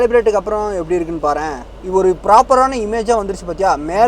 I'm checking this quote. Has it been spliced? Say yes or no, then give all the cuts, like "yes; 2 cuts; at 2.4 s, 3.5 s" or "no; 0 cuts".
no; 0 cuts